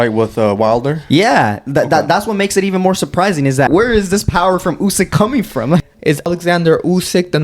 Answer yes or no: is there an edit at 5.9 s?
yes